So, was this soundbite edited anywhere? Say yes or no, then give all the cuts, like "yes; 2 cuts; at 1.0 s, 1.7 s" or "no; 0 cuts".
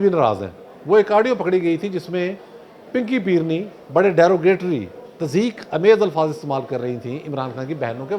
no; 0 cuts